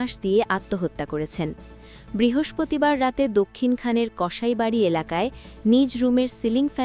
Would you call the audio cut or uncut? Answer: uncut